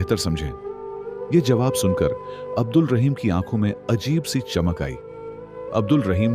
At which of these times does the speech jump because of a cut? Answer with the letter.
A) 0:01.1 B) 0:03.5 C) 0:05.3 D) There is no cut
C